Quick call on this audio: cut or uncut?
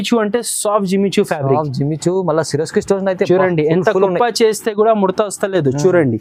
uncut